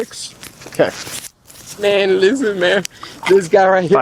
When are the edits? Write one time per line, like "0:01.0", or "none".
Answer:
none